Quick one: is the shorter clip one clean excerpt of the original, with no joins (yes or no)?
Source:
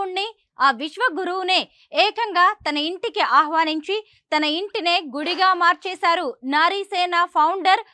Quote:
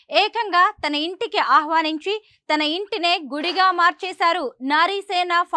yes